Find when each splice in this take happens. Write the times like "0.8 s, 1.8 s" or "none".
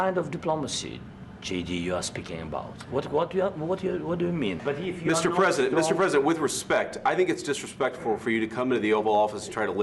4.6 s